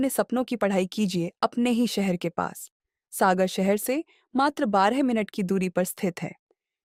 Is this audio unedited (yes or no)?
yes